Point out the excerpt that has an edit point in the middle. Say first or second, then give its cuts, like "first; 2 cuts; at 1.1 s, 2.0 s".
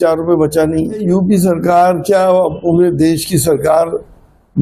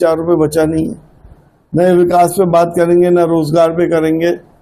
first; 1 cut; at 1.0 s